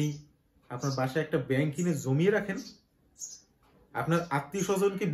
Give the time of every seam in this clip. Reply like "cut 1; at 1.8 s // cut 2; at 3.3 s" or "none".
none